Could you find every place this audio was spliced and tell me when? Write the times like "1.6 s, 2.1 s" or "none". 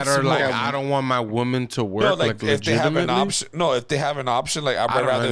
none